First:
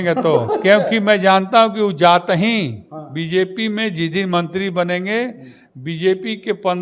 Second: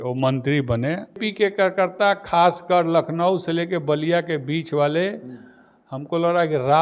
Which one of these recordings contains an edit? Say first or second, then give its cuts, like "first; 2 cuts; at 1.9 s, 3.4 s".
second; 1 cut; at 1.2 s